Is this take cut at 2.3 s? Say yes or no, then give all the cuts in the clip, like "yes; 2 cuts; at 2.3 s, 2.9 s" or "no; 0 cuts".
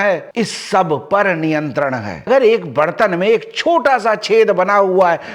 yes; 1 cut; at 2.3 s